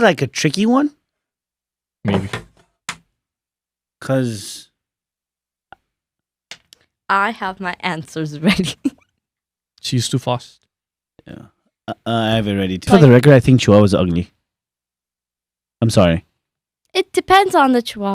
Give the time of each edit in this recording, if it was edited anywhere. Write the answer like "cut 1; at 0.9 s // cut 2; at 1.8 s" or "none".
cut 1; at 12.9 s